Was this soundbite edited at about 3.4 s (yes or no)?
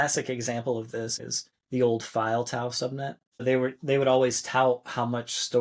yes